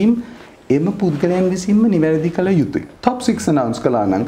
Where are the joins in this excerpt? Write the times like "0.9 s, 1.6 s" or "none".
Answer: 2.9 s